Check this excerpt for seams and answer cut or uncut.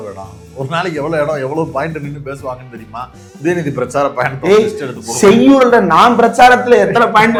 uncut